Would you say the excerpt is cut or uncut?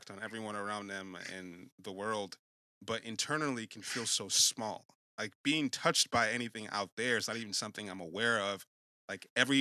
cut